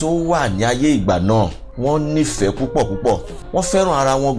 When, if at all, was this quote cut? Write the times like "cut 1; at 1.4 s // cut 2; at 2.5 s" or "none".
cut 1; at 1.6 s // cut 2; at 3.3 s